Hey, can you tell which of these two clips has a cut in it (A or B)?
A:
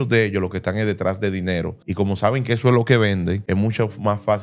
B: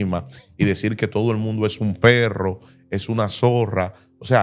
A